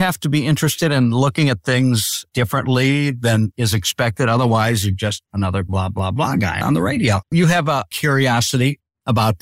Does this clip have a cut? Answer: yes; 1 cut; at 7.2 s

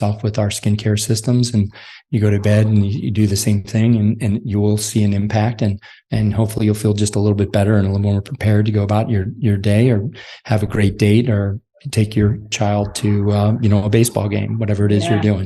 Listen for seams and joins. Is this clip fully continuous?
no; 1 cut; at 12.5 s

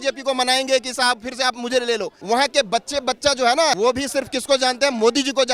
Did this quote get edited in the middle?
yes; 2 cuts; at 2.1 s, 3.8 s

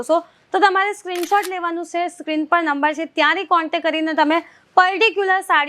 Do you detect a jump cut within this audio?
no; 0 cuts

